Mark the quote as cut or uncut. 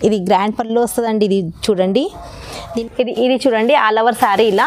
cut